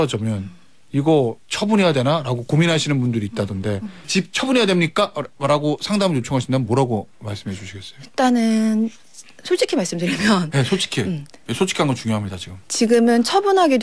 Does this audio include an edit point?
yes; 1 cut; at 4.0 s

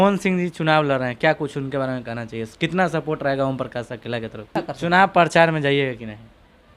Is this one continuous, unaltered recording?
no; 1 cut; at 4.5 s

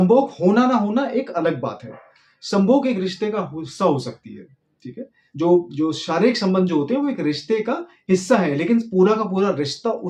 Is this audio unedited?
yes; 0 cuts

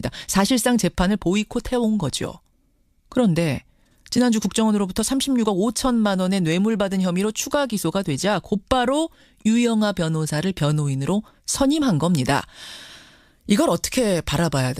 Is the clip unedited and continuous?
no; 1 cut; at 8.7 s

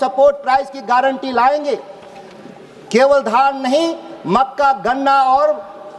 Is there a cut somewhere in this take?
no; 0 cuts

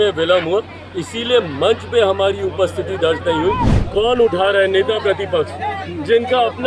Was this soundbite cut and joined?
yes; 1 cut; at 3.8 s

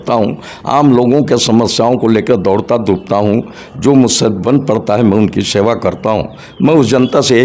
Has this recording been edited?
no; 0 cuts

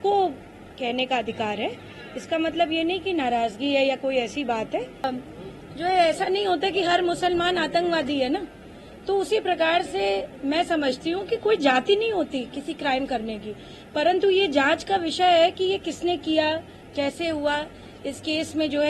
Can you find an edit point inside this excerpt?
yes; 1 cut; at 5.0 s

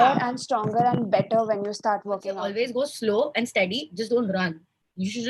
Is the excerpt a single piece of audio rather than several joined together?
no; 1 cut; at 2.3 s

